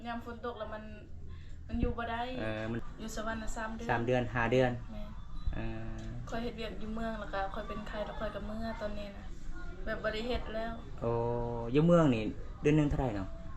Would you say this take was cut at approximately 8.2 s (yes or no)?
no